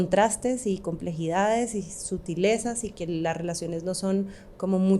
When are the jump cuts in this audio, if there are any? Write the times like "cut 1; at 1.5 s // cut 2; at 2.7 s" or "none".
none